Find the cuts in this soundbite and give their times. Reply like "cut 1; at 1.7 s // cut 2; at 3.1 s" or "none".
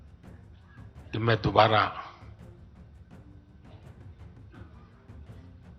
cut 1; at 1.1 s // cut 2; at 2.2 s